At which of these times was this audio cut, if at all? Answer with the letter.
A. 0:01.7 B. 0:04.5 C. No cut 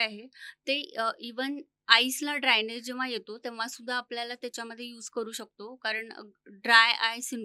C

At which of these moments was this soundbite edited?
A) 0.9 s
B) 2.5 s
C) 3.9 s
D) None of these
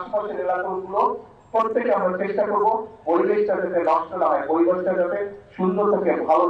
D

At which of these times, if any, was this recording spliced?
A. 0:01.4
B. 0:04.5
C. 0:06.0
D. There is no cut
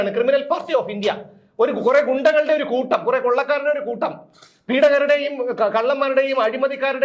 D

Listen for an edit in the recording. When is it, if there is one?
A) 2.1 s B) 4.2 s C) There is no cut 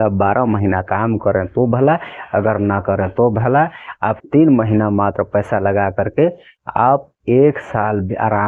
C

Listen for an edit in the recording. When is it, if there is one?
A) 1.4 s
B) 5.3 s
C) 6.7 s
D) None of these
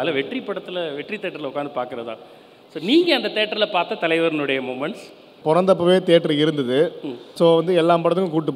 B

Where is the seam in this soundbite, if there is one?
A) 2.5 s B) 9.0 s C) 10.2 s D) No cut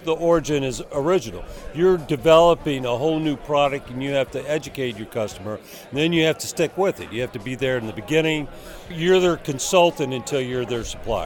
B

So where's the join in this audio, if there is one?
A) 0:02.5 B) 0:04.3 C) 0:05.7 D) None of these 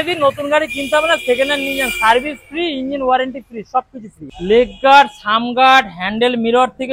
B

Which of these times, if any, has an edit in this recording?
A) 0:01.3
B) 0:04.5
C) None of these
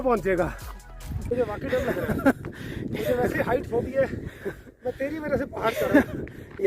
A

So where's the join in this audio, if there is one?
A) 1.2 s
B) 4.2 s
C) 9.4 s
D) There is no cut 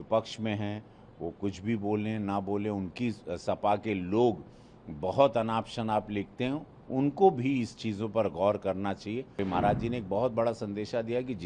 C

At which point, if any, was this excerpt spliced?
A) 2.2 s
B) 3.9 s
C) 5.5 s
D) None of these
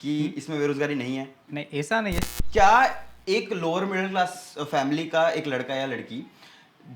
A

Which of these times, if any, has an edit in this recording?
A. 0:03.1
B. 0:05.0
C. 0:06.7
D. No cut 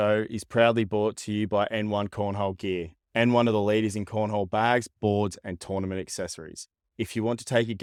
D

